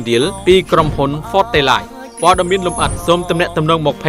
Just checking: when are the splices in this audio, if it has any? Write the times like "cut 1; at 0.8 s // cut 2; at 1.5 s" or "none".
none